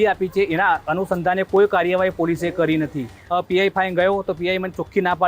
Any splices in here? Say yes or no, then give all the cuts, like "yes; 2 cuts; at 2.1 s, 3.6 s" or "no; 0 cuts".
yes; 1 cut; at 3.1 s